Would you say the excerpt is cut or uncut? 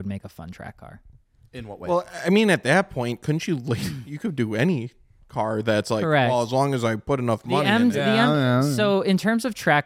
uncut